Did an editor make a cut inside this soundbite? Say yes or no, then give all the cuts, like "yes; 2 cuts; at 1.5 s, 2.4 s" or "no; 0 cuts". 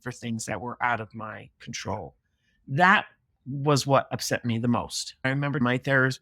yes; 1 cut; at 5.0 s